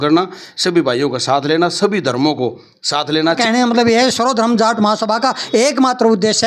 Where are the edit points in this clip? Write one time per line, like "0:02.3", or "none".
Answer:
0:03.4

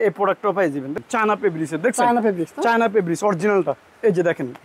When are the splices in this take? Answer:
0:00.9

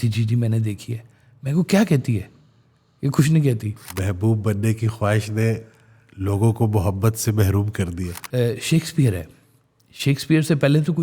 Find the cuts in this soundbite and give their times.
0:03.8
0:08.2

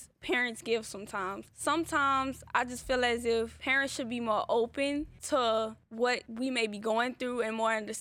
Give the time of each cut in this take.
0:01.5
0:03.6
0:05.2
0:06.2

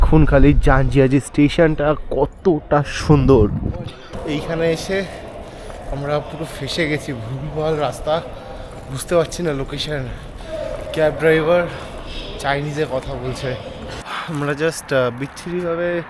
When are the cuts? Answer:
0:04.1
0:14.1

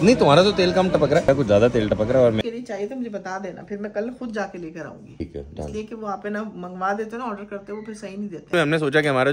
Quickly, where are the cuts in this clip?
0:01.3
0:02.4
0:05.2
0:08.5

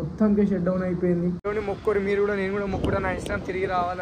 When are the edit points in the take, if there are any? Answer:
0:01.4

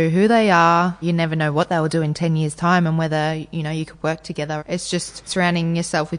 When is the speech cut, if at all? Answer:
0:01.0
0:04.6

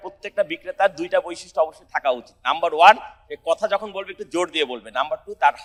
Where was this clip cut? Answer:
none

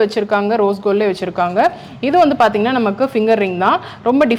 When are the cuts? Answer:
none

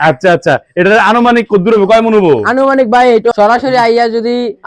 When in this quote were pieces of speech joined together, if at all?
0:03.3

